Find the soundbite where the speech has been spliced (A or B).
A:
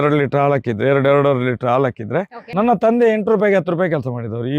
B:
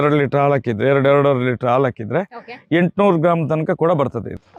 A